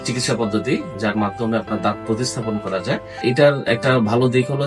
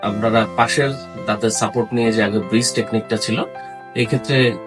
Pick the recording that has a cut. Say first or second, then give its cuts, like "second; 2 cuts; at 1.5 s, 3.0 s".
first; 1 cut; at 3.2 s